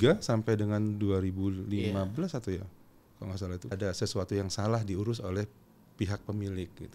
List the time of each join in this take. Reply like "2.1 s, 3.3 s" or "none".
3.7 s

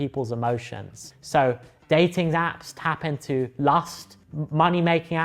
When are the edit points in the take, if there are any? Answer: none

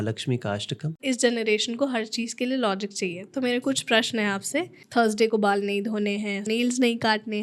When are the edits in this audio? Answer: 1.0 s, 4.8 s, 6.5 s

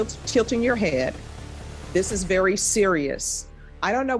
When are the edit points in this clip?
none

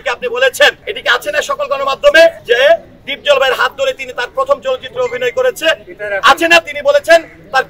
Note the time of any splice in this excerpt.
0.9 s, 2.4 s

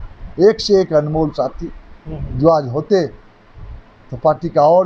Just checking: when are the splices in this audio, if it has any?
none

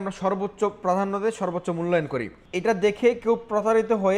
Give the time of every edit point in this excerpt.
2.4 s

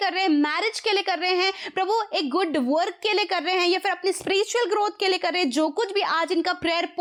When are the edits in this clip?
none

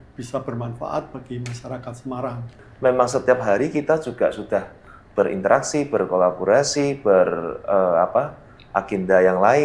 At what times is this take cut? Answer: 2.6 s

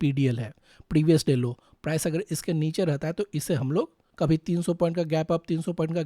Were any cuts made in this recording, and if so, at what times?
4.0 s

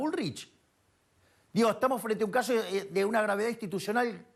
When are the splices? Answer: none

